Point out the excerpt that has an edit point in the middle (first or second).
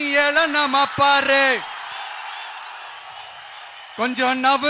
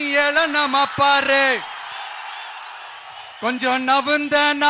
second